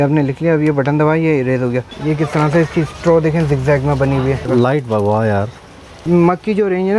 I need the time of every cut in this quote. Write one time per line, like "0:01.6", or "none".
0:01.9
0:04.4
0:06.0